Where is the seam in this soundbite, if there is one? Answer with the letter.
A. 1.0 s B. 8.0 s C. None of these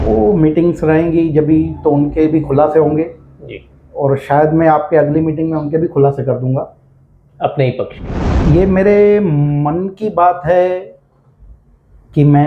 B